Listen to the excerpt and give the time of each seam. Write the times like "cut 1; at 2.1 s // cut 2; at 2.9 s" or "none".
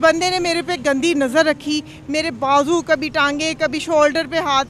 none